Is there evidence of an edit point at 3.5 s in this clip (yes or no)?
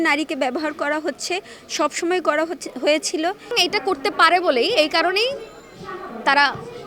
yes